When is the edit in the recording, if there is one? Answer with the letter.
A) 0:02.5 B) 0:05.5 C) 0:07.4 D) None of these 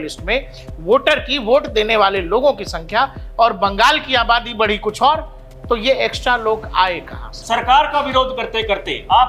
C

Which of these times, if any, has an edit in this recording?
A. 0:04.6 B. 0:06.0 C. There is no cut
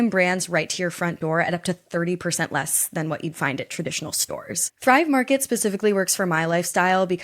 A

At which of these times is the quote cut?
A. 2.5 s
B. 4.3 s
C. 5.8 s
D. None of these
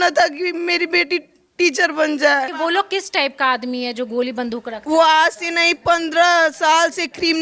A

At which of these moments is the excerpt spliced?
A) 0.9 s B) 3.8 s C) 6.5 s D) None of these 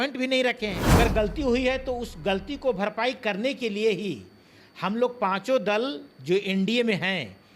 A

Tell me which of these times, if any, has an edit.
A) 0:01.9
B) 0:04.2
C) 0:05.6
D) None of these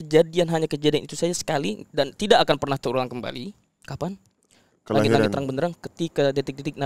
D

